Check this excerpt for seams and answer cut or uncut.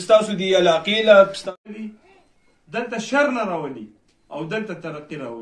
cut